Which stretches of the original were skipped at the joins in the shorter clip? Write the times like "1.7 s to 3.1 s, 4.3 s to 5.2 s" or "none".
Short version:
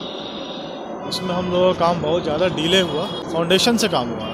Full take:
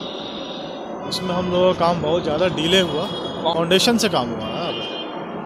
3.3 s to 3.5 s